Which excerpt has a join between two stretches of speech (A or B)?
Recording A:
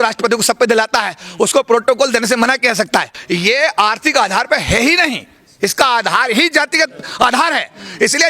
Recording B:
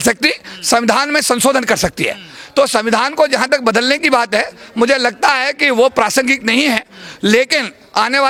A